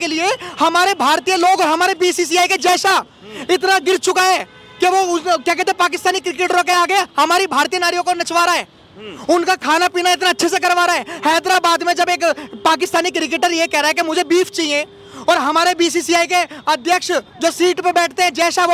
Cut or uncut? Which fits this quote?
uncut